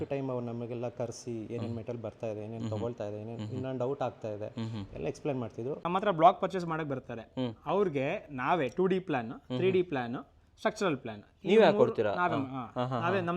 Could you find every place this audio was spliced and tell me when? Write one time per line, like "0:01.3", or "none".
0:05.8